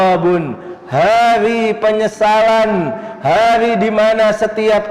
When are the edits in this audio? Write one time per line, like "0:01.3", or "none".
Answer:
none

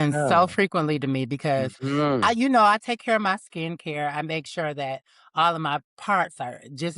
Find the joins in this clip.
none

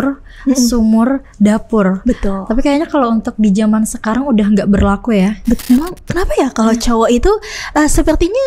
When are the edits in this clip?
0:05.6

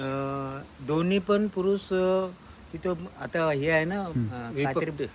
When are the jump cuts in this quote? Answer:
none

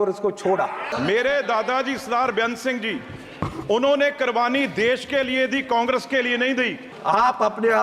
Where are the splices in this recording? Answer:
0:00.9
0:06.9

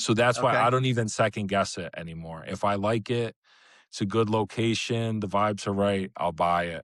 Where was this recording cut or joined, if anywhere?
none

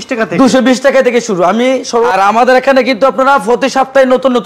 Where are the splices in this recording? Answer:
0:02.1

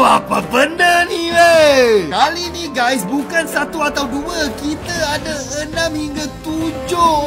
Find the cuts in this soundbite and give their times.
none

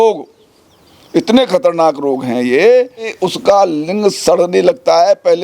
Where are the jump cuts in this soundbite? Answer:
0:03.2

